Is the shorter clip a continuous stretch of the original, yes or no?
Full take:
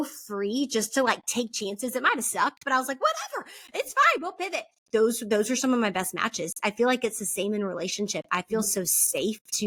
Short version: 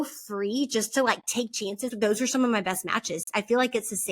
no